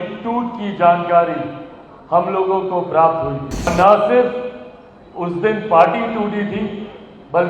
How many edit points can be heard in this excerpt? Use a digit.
1